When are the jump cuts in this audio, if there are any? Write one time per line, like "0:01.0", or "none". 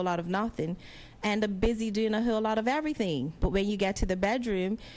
none